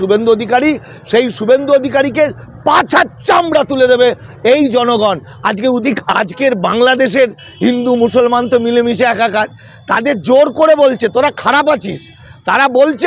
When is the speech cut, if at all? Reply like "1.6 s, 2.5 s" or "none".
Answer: 5.8 s